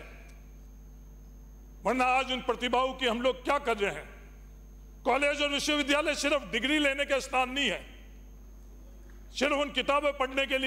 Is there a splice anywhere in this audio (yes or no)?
no